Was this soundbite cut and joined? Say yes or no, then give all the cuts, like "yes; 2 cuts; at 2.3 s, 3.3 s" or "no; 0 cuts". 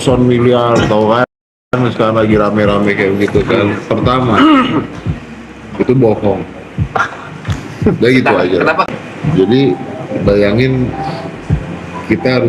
yes; 1 cut; at 8.9 s